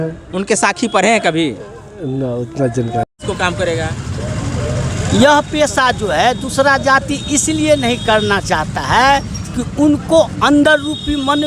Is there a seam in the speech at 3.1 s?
yes; 1 cut; at 3.1 s

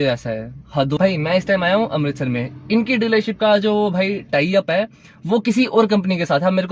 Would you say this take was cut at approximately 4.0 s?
no; 1 cut; at 1.0 s

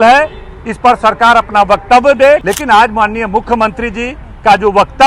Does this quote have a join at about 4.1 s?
no; 1 cut; at 2.4 s

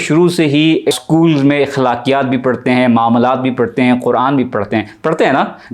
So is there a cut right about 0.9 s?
yes; 1 cut; at 0.9 s

